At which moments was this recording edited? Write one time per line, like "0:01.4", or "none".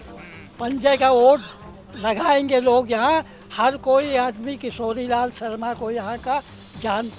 none